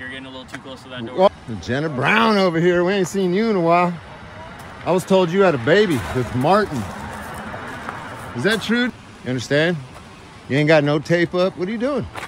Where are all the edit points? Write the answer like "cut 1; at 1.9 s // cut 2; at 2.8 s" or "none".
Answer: cut 1; at 1.3 s // cut 2; at 7.0 s // cut 3; at 8.9 s

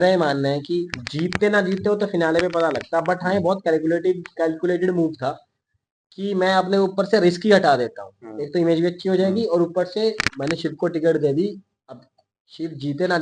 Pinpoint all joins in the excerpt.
none

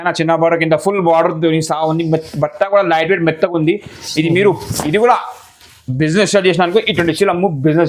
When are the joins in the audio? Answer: none

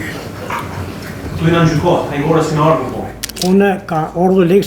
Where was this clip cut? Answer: cut 1; at 3.4 s

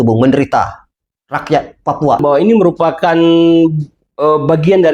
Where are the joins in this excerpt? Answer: cut 1; at 2.2 s

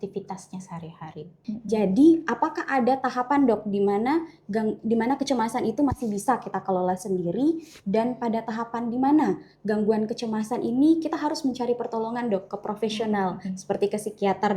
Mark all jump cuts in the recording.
cut 1; at 1.5 s

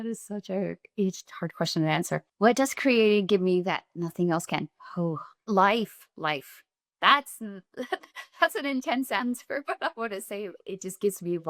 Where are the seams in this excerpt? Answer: cut 1; at 2.3 s // cut 2; at 5.5 s

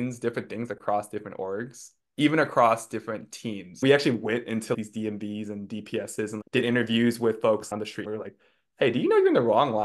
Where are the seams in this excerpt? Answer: cut 1; at 3.8 s

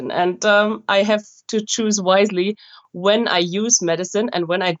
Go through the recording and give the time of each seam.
none

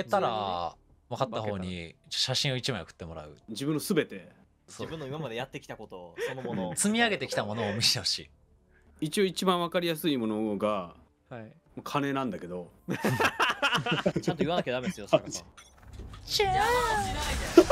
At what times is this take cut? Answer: cut 1; at 3.5 s // cut 2; at 4.6 s // cut 3; at 8.8 s // cut 4; at 14.2 s // cut 5; at 15.4 s

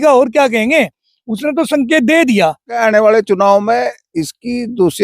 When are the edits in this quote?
cut 1; at 2.8 s

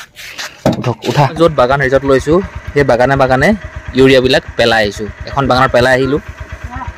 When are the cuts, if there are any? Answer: cut 1; at 1.4 s

